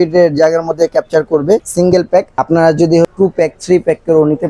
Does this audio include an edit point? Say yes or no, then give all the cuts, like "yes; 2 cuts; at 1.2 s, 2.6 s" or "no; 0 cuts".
yes; 2 cuts; at 1.8 s, 3.1 s